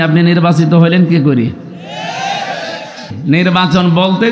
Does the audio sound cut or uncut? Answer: cut